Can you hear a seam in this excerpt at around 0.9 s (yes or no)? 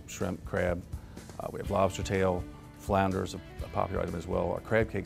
no